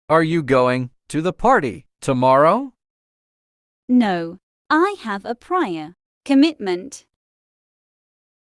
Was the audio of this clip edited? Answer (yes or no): no